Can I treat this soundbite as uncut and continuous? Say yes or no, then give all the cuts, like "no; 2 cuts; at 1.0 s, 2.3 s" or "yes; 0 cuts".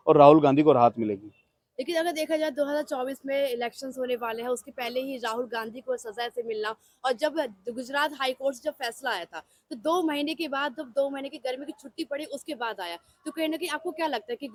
yes; 0 cuts